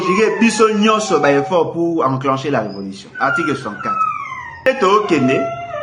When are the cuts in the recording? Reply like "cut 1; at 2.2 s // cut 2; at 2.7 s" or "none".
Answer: cut 1; at 4.7 s